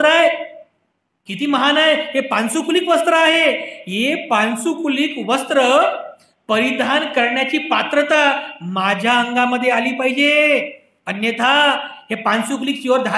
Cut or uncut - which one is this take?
uncut